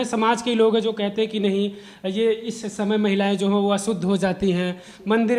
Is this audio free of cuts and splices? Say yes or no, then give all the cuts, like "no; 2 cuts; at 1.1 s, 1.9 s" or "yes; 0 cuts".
yes; 0 cuts